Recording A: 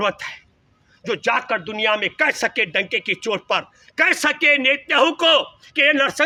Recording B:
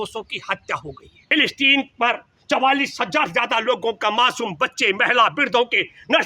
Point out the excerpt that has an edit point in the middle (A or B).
B